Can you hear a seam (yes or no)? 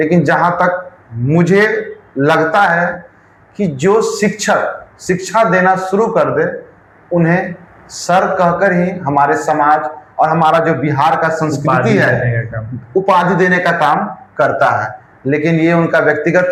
no